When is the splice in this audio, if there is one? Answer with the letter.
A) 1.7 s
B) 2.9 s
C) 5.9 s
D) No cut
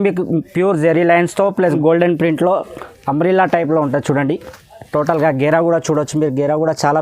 A